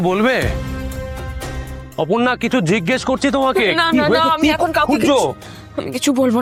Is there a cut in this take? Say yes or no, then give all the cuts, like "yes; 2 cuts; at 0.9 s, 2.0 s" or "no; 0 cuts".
no; 0 cuts